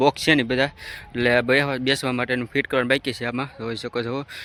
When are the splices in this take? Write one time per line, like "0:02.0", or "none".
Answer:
none